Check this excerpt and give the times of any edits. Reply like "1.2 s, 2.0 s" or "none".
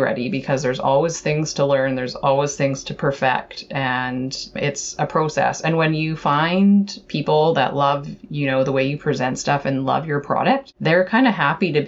10.7 s

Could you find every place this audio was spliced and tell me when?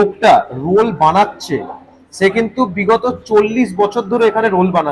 none

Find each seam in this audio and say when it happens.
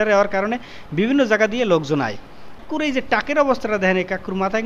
2.6 s

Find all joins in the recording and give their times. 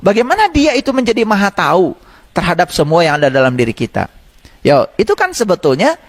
none

